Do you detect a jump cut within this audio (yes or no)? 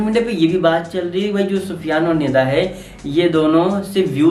no